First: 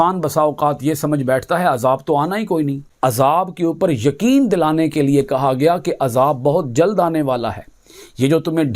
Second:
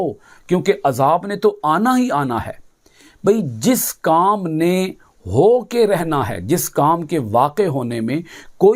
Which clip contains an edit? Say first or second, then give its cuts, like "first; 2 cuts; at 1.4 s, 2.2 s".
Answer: first; 1 cut; at 2.9 s